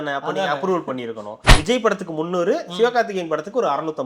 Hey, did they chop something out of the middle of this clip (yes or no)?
yes